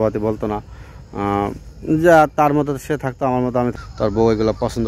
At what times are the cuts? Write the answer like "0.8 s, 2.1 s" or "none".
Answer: 3.8 s